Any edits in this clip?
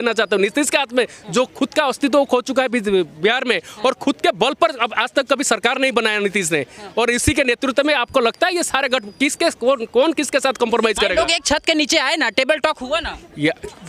no; 0 cuts

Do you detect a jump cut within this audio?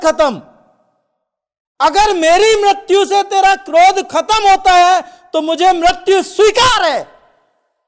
no; 0 cuts

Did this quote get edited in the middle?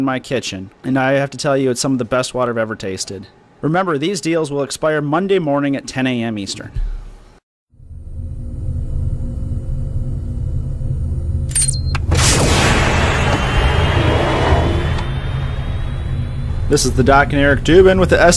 yes; 1 cut; at 11.3 s

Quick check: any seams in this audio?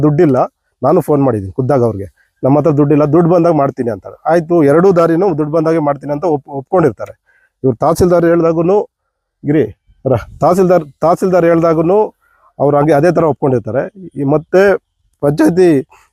no; 0 cuts

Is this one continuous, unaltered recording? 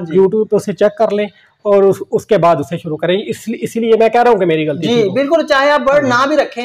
yes; 0 cuts

